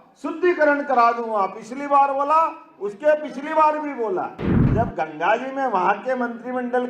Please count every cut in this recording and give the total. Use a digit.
1